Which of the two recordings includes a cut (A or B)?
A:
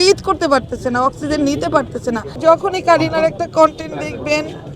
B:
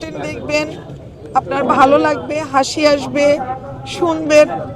A